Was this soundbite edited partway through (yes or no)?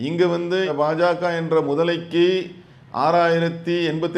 no